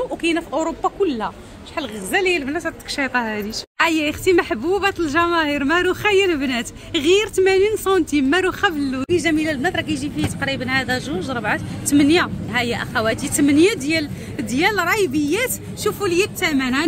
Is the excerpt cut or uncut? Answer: cut